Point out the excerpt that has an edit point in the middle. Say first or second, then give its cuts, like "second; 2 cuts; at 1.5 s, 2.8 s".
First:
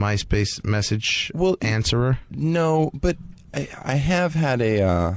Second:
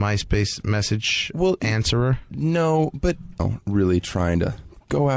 first; 1 cut; at 3.3 s